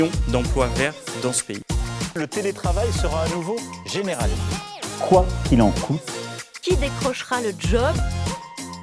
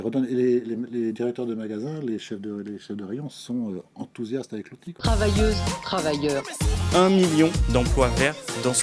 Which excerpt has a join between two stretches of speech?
second; 1 cut; at 4.9 s

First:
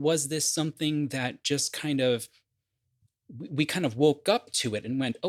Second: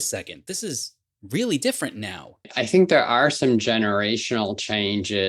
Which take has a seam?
second; 1 cut; at 2.4 s

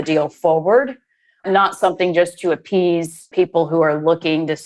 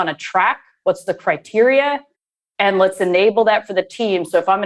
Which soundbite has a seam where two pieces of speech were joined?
first; 2 cuts; at 1.4 s, 3.3 s

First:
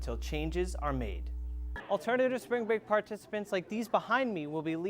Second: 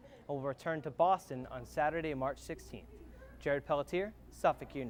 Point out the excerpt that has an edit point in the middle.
first; 1 cut; at 1.7 s

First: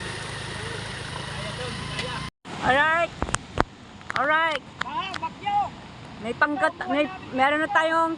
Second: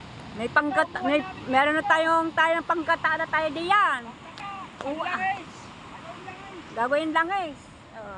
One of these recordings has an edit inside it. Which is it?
first; 1 cut; at 2.3 s

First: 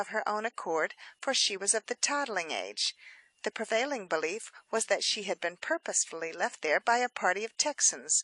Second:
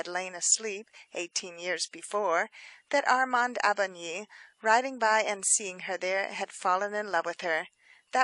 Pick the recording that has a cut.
first; 1 cut; at 2.4 s

